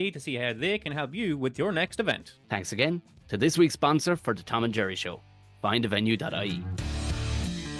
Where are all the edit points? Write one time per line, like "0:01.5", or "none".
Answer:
0:06.5